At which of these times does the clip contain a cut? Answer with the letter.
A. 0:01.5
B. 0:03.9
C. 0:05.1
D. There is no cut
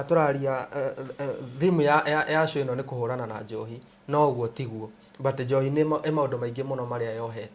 D